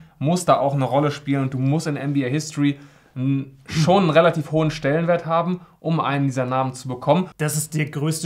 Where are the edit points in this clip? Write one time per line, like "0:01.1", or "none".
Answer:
0:07.3